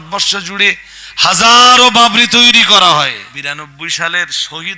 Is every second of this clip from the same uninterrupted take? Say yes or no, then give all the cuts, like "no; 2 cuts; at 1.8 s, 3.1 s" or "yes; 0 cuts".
no; 1 cut; at 3.3 s